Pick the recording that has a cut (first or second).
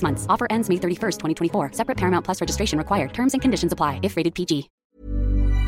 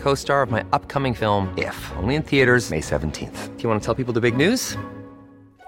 first